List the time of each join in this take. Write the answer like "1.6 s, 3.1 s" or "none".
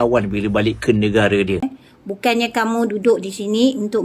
1.8 s